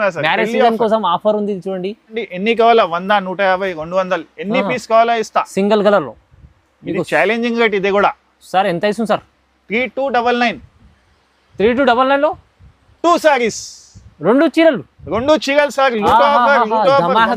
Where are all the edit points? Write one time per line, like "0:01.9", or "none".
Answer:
0:02.2